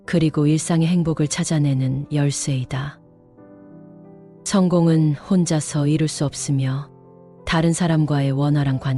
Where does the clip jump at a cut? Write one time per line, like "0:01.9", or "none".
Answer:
0:02.9
0:04.4